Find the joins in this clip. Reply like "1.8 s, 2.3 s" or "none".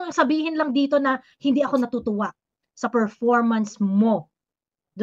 none